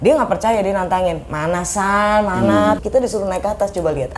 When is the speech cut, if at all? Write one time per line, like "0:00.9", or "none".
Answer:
0:02.8